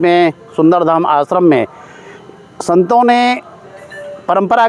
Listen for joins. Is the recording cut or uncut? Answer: uncut